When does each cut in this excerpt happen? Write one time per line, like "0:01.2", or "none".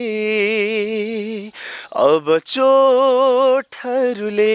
none